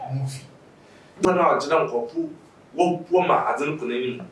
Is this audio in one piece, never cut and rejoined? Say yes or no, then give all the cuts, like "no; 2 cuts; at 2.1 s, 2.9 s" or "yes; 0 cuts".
no; 1 cut; at 1.2 s